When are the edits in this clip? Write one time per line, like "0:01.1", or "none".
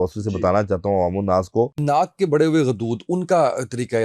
0:01.8

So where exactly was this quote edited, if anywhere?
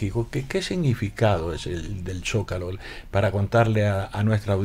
none

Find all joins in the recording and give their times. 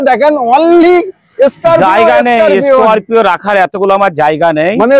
none

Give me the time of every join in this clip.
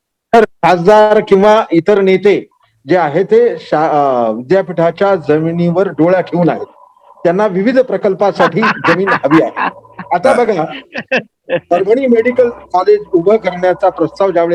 none

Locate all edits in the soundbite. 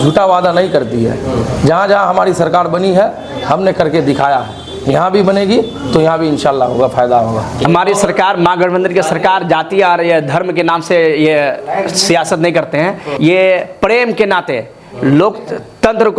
0:07.7
0:13.1

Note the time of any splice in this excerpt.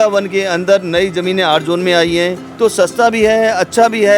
0:02.4

